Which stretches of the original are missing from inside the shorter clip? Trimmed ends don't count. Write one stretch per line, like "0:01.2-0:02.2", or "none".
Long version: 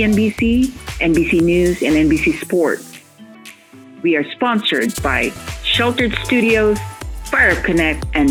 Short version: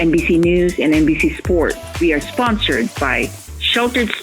0:02.9-0:03.9